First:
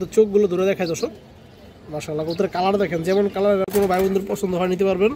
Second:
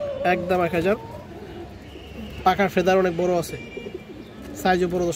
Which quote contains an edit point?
first; 1 cut; at 3.7 s

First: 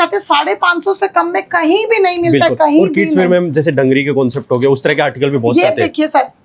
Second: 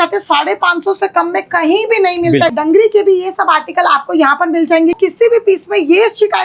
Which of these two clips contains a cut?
second; 2 cuts; at 2.5 s, 5.0 s

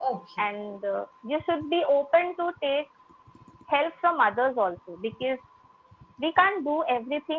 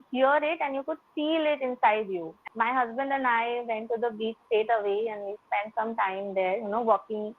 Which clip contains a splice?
second; 1 cut; at 2.4 s

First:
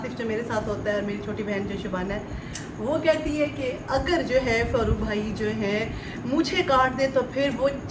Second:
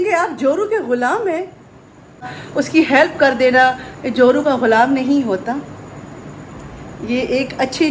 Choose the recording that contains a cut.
second; 1 cut; at 2.4 s

